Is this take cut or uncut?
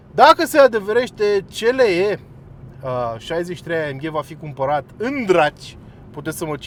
uncut